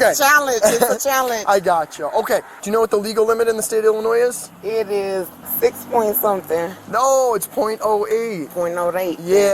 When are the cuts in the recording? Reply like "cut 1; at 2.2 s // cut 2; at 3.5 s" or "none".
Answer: cut 1; at 2.6 s // cut 2; at 5.4 s